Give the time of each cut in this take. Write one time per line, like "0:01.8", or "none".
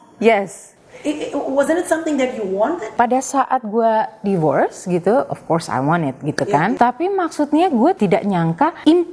0:02.9
0:06.8
0:08.2